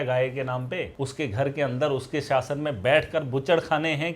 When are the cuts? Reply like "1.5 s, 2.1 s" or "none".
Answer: 0.9 s